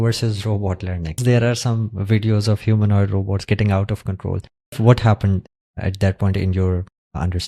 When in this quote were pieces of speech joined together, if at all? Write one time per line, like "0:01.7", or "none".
0:01.2
0:04.8